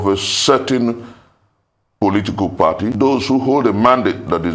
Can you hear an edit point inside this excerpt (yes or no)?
yes